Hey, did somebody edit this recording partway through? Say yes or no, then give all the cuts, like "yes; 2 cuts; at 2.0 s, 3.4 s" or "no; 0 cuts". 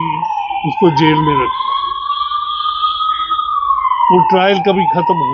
no; 0 cuts